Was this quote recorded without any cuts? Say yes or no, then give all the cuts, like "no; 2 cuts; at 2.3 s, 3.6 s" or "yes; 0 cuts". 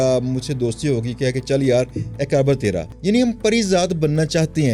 no; 1 cut; at 2.9 s